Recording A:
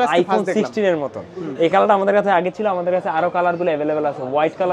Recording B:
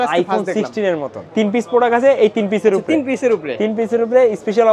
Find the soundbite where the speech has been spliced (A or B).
B